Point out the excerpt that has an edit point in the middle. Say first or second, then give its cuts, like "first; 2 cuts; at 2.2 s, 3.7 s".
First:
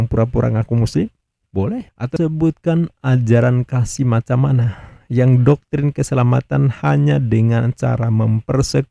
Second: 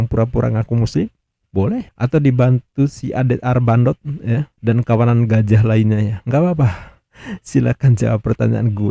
first; 1 cut; at 2.0 s